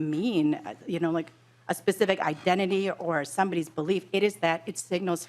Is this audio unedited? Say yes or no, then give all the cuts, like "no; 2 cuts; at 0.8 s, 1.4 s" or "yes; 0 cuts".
yes; 0 cuts